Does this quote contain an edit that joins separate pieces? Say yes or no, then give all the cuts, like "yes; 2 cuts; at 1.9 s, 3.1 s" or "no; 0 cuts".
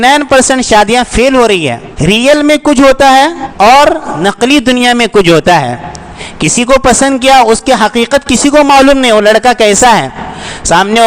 yes; 3 cuts; at 1.9 s, 3.4 s, 4.1 s